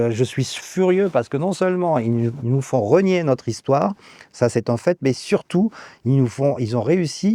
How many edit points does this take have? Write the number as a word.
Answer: zero